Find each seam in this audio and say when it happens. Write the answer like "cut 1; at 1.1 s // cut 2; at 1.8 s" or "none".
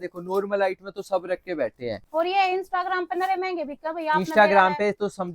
cut 1; at 2.0 s